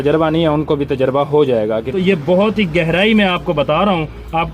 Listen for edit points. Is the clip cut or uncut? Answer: cut